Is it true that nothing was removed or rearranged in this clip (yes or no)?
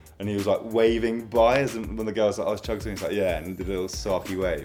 yes